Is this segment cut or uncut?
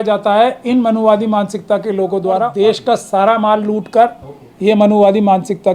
cut